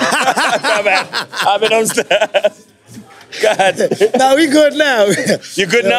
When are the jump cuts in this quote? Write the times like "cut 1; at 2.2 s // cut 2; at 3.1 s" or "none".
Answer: none